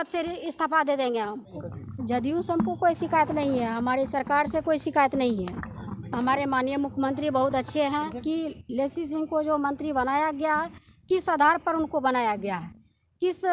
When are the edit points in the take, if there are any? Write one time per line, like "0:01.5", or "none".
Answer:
0:01.5
0:08.2